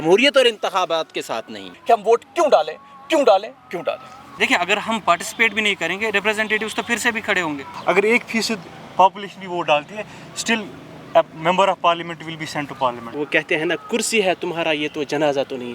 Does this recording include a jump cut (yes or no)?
yes